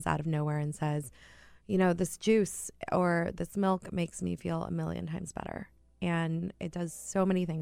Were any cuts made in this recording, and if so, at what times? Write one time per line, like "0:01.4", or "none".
none